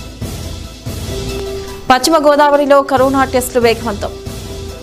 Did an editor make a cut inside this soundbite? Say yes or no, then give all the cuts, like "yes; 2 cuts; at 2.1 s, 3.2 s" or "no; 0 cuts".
yes; 1 cut; at 1.5 s